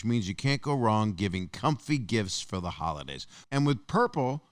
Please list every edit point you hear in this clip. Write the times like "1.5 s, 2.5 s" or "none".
3.4 s

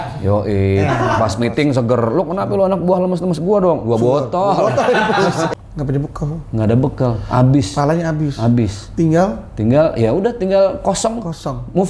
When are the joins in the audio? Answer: 5.5 s

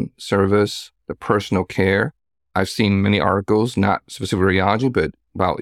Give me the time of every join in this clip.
none

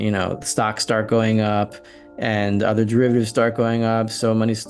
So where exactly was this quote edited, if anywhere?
none

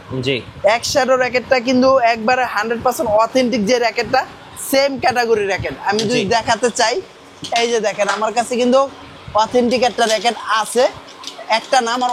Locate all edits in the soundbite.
none

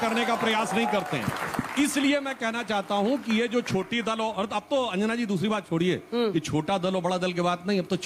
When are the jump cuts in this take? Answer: none

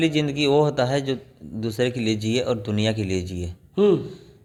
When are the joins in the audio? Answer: none

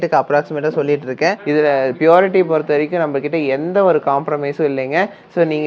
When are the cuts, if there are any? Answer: 1.4 s

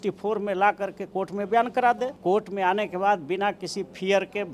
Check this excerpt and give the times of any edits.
2.1 s

